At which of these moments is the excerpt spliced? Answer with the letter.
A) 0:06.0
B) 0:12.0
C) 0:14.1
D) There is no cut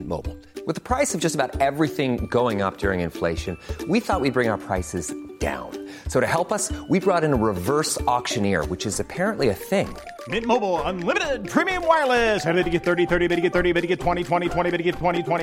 D